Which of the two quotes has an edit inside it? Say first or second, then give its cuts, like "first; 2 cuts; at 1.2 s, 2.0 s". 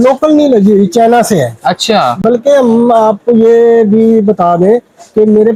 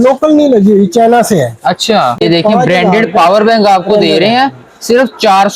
second; 1 cut; at 2.2 s